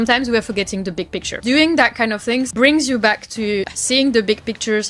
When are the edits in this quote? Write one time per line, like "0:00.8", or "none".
0:01.3
0:02.5
0:03.8

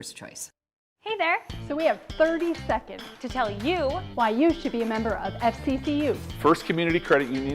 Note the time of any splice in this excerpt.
0:01.5

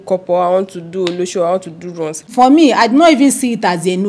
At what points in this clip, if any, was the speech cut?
0:02.3

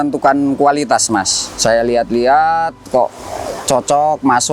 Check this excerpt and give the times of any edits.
0:01.5

